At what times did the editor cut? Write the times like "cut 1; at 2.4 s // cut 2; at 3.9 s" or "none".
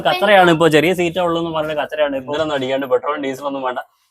cut 1; at 2.3 s